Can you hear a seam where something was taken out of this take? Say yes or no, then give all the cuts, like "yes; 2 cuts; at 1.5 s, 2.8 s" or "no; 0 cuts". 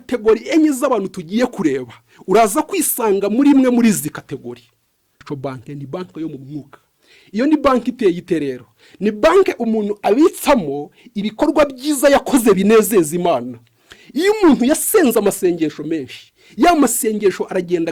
yes; 1 cut; at 5.2 s